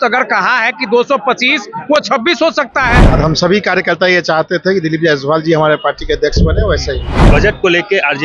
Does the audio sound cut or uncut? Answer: cut